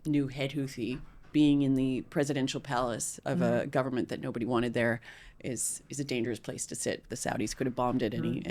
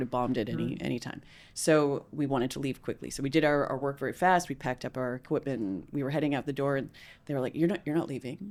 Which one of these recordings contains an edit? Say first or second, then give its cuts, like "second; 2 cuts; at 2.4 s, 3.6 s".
first; 1 cut; at 1.3 s